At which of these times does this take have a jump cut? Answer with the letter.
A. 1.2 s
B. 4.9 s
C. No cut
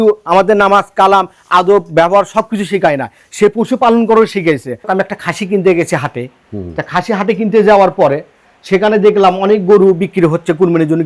B